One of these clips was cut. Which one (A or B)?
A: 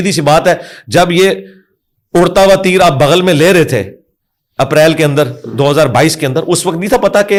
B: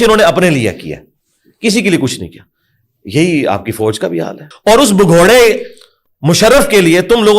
B